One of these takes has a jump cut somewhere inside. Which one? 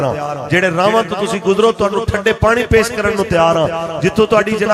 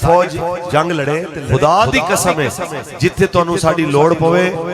second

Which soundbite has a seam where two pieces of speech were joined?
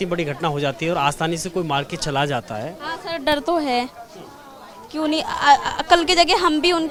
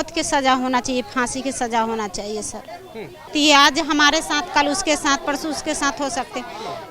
second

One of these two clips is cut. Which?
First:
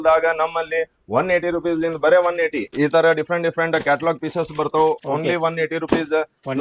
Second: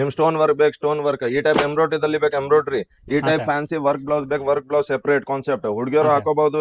first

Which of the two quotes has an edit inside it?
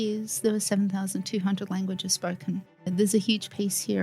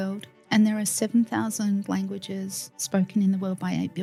first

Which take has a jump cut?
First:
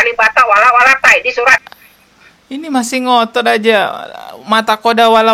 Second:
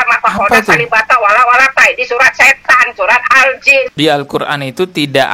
second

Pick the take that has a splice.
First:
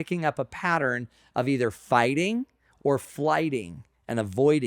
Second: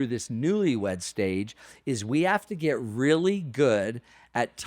first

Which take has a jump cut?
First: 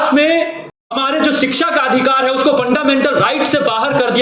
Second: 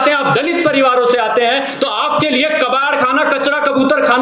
first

